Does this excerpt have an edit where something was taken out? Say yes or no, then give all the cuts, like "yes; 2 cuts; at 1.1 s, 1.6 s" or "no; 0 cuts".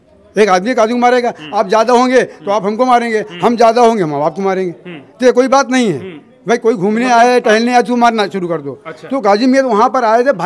no; 0 cuts